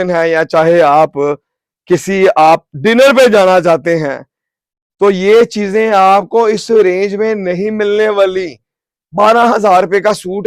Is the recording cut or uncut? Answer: uncut